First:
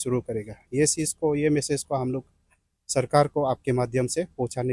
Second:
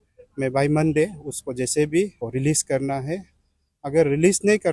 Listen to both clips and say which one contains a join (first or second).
second